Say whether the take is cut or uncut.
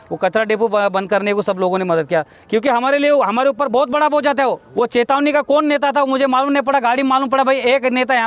cut